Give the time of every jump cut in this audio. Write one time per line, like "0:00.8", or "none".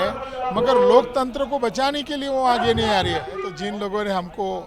0:03.4